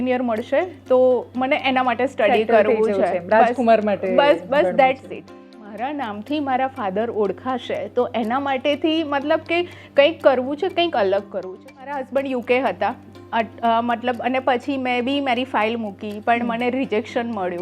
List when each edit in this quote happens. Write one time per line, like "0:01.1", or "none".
0:05.5
0:11.9